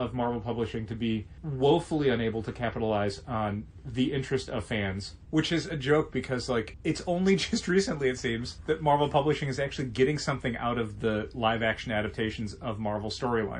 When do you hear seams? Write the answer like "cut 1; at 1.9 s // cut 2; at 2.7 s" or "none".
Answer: cut 1; at 5.1 s // cut 2; at 6.7 s // cut 3; at 8.5 s